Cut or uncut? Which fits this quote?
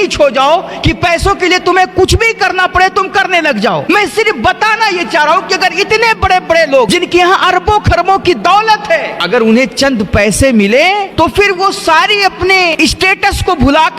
cut